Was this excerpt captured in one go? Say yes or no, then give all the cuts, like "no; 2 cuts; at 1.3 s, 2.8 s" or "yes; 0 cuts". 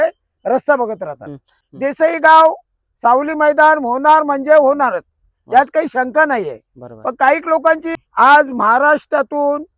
no; 2 cuts; at 1.8 s, 7.9 s